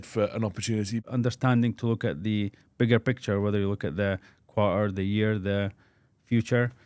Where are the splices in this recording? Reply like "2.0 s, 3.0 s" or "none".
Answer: 1.0 s